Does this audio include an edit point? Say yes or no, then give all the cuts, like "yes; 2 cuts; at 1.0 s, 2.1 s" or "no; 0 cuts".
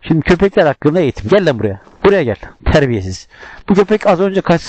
no; 0 cuts